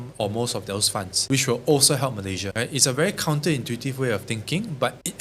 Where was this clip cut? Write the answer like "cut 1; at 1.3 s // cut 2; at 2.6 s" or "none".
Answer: cut 1; at 1.1 s // cut 2; at 2.5 s